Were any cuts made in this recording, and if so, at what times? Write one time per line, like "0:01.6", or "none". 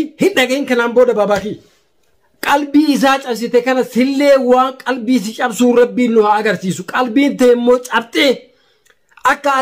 0:02.3